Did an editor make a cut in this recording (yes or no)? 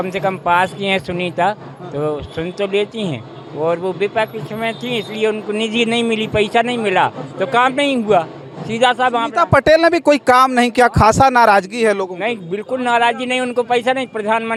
no